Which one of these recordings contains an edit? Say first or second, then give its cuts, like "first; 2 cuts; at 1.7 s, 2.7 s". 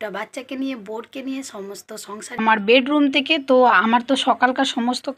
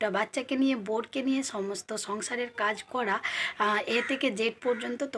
first; 1 cut; at 2.4 s